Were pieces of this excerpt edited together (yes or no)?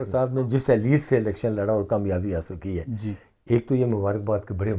no